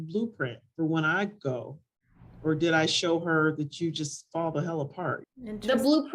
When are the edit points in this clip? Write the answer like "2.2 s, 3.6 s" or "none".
5.2 s